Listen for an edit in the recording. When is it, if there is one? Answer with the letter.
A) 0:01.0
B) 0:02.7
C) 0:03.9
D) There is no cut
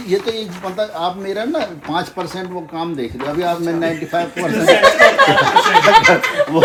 D